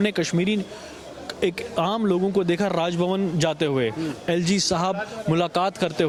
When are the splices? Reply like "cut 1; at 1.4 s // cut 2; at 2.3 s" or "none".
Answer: none